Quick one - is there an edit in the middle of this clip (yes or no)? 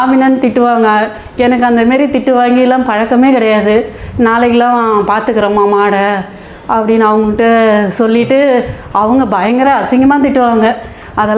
no